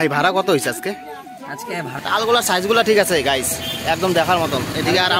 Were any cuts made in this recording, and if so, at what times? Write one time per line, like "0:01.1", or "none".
0:02.0